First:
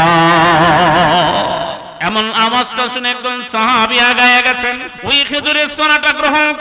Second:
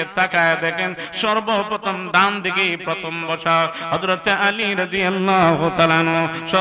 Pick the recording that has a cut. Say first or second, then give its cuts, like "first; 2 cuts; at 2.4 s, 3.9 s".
first; 2 cuts; at 1.9 s, 4.9 s